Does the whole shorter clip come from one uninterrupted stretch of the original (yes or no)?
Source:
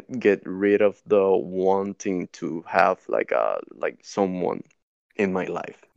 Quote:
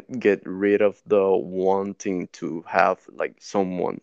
no